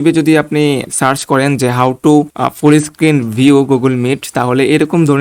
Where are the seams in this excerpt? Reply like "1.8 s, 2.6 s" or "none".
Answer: 0.9 s, 2.4 s